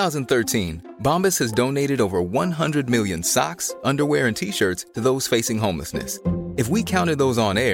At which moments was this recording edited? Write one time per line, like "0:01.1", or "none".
none